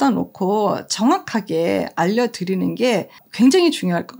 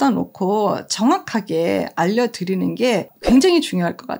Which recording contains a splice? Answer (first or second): second